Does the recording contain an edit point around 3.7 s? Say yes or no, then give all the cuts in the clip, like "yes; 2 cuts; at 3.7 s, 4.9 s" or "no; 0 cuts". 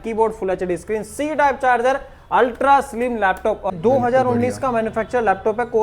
yes; 1 cut; at 3.7 s